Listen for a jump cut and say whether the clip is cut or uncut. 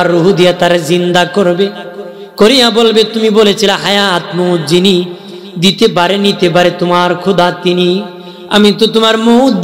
uncut